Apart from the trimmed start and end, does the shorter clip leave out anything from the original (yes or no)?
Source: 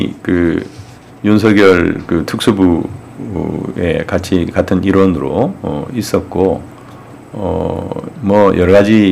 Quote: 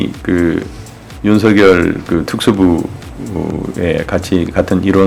no